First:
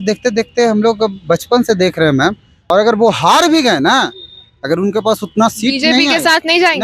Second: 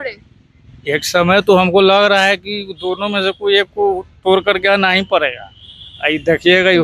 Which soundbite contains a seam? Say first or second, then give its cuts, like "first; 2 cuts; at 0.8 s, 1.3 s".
first; 1 cut; at 2.5 s